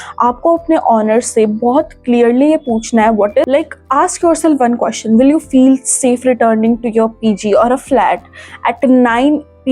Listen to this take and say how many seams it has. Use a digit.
1